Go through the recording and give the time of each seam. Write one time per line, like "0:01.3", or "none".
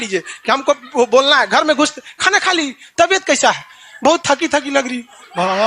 none